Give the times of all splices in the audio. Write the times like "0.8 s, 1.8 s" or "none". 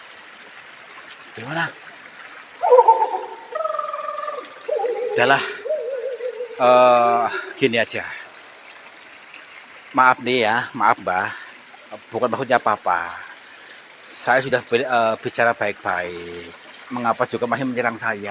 none